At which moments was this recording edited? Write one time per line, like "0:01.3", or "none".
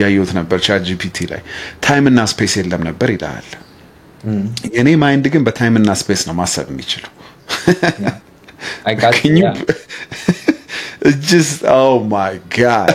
none